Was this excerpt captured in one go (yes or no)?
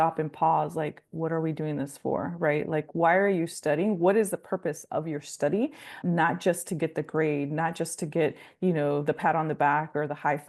no